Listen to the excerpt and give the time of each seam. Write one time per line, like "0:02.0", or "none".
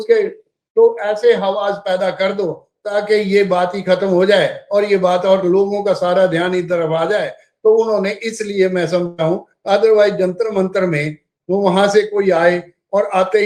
none